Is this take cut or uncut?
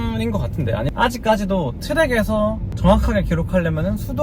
cut